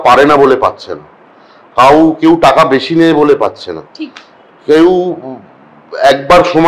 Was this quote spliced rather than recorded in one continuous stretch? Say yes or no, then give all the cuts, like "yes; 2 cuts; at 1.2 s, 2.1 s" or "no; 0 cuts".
no; 0 cuts